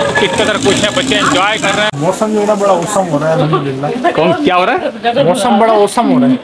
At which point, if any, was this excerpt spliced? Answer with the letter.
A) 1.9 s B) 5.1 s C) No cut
A